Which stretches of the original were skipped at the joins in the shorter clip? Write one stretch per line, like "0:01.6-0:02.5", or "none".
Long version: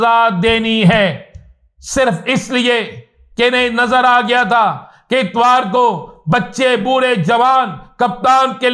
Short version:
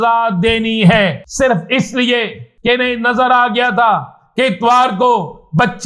0:01.2-0:01.8
0:03.0-0:03.2

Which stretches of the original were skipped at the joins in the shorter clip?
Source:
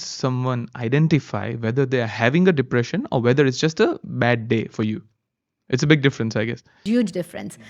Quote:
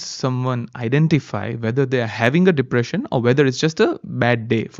none

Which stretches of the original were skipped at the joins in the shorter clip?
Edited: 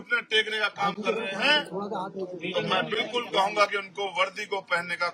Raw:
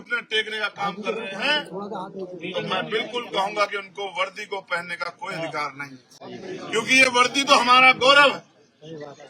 none

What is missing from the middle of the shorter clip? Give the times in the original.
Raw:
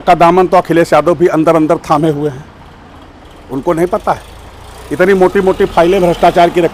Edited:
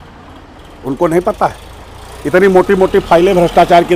none

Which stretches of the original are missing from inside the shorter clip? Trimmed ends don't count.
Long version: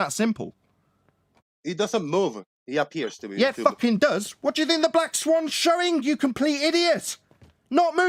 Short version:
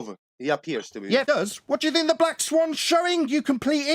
0:03.5-0:04.0

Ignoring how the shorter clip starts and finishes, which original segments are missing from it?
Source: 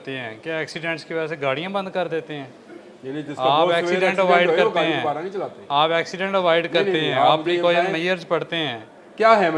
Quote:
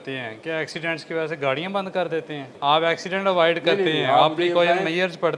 0:02.5-0:05.6

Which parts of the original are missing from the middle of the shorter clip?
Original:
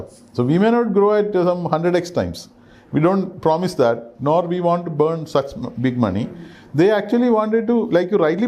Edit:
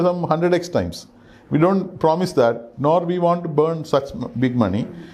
none

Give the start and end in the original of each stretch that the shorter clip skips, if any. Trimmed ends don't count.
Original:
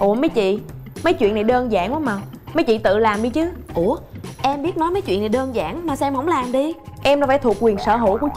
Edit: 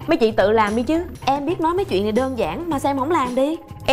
0:03.6-0:04.3

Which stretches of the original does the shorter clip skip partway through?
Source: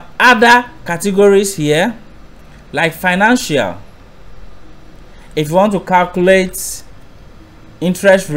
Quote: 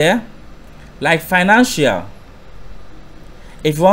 none

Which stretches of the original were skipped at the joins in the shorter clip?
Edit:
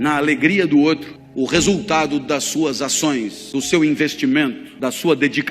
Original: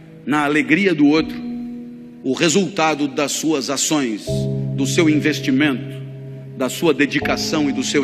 0:01.4-0:02.0
0:04.3-0:04.6
0:05.9-0:06.4

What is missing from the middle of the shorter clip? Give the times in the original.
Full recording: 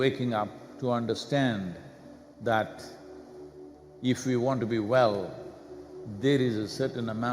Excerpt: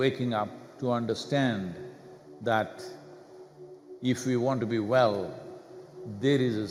none

